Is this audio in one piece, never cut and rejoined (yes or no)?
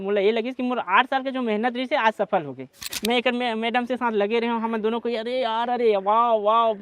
no